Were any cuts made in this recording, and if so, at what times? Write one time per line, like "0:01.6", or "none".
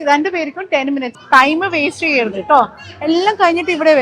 0:01.1